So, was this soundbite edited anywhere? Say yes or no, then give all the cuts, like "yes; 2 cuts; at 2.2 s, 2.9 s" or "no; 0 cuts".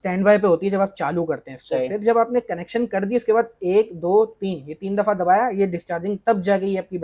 no; 0 cuts